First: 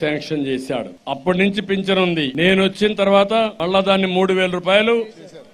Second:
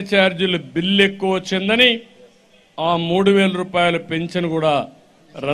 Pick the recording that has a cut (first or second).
first